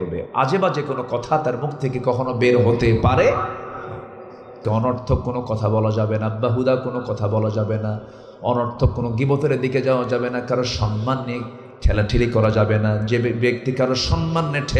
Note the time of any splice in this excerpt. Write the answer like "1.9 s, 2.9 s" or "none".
4.6 s

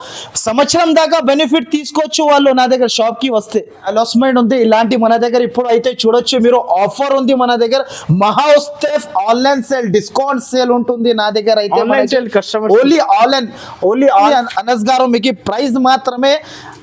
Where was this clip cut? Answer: 3.9 s, 14.3 s

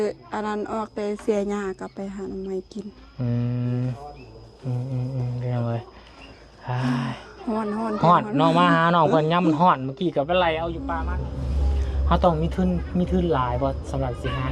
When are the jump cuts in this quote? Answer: 10.9 s

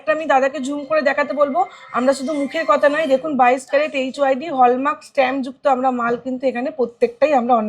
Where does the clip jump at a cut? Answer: none

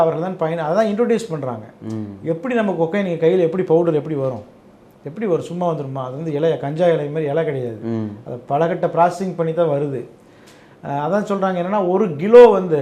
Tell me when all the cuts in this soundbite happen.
none

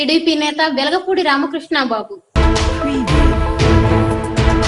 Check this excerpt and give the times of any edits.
2.2 s

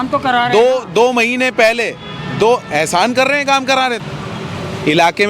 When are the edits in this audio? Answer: 4.0 s

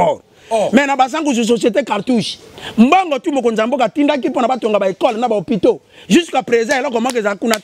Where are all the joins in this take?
none

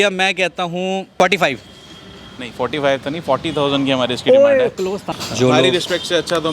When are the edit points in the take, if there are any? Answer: 1.1 s, 5.1 s

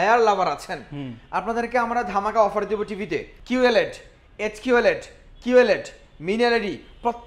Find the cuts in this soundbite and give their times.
3.3 s

